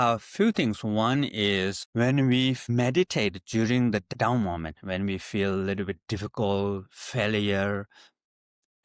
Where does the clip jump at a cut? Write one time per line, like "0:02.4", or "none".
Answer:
0:01.8
0:02.6
0:04.1